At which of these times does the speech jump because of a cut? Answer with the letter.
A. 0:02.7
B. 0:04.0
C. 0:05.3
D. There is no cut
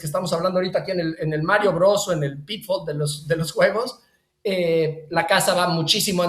D